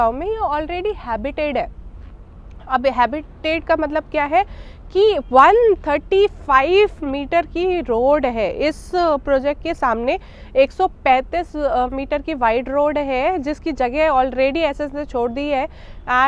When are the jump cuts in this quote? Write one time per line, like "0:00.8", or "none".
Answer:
none